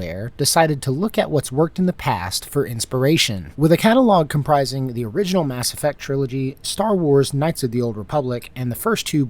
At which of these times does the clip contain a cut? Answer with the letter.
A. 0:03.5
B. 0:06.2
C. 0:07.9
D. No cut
A